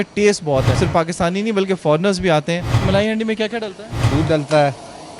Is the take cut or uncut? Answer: cut